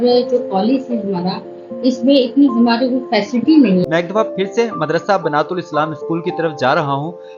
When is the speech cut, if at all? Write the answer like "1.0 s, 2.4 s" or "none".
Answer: 3.8 s